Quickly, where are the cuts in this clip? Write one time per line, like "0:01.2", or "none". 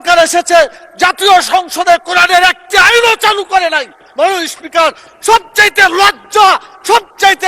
none